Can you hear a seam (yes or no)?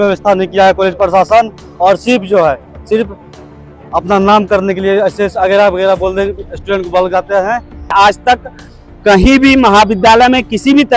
yes